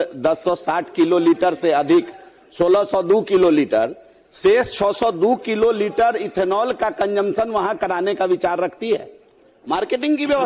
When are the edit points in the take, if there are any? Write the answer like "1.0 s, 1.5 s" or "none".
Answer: none